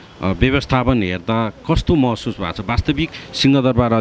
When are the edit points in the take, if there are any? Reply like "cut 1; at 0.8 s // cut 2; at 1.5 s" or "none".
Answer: none